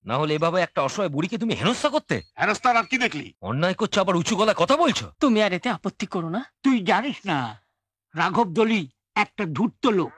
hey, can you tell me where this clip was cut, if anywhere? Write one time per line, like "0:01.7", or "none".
0:02.3
0:03.3
0:05.1